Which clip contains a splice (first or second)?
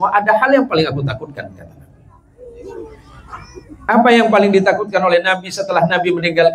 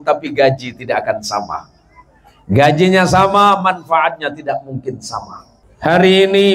second